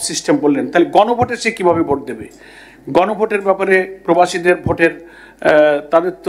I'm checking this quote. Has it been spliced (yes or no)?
no